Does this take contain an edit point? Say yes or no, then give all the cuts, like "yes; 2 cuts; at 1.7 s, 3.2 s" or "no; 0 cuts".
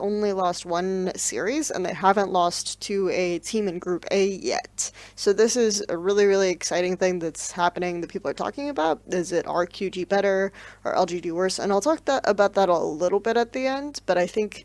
no; 0 cuts